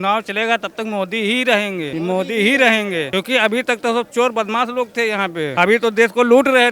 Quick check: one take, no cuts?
no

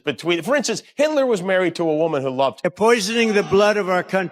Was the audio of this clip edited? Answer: yes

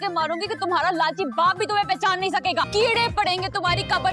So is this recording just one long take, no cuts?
no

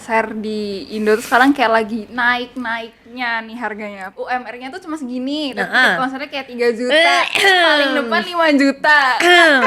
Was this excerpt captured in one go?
no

